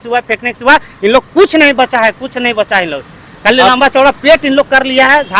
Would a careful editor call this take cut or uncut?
uncut